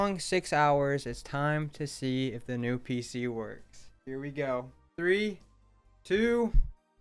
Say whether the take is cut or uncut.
uncut